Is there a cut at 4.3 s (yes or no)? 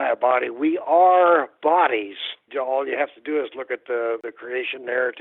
yes